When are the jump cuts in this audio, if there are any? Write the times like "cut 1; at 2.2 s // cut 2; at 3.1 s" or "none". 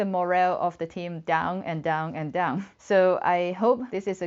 none